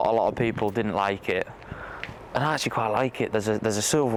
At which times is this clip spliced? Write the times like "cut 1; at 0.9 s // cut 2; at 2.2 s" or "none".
none